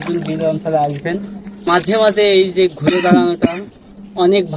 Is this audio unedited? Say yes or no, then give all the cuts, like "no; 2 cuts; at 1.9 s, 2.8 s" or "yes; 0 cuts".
no; 1 cut; at 1.7 s